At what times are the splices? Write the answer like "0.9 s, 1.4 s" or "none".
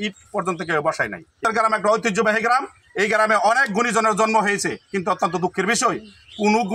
1.4 s